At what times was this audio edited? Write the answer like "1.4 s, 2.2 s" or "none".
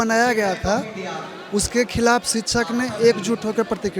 none